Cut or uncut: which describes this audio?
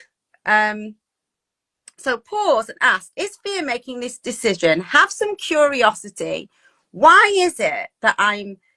uncut